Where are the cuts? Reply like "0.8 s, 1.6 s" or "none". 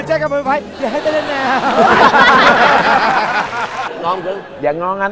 3.8 s